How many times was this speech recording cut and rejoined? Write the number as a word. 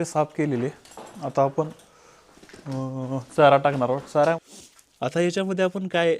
one